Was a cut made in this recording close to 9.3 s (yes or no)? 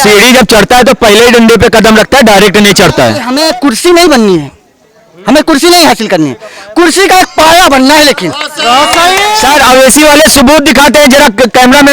yes